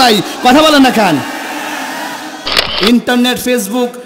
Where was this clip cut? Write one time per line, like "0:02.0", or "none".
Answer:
0:02.6